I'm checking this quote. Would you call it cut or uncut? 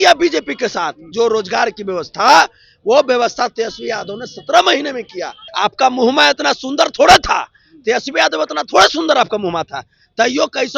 cut